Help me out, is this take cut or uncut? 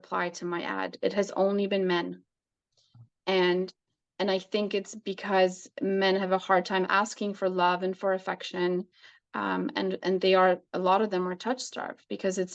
uncut